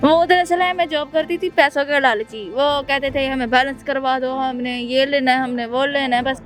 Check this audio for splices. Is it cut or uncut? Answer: uncut